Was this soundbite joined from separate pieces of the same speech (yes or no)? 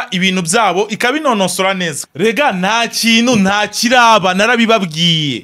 yes